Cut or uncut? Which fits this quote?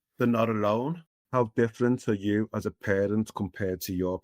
cut